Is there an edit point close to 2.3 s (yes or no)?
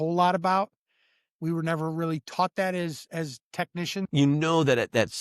no